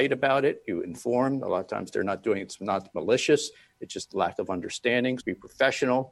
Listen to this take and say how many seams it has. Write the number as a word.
one